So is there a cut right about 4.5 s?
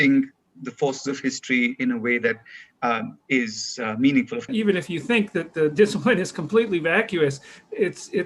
yes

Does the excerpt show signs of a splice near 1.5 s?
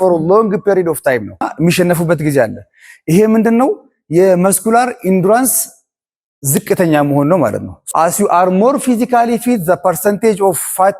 yes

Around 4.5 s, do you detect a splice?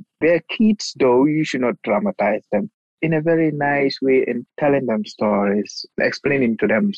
yes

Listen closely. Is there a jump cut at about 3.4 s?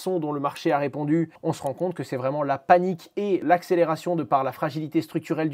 yes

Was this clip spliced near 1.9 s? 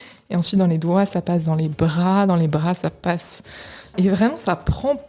no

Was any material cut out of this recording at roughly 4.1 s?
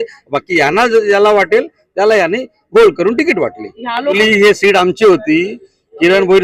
yes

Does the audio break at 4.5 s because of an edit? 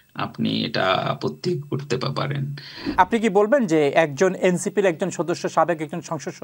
no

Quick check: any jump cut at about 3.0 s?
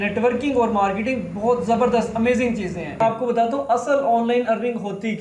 yes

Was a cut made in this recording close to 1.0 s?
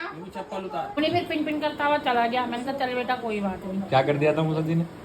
yes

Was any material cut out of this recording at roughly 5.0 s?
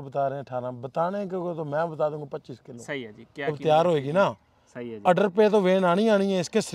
no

